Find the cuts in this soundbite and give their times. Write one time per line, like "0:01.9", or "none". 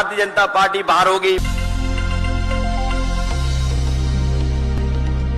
none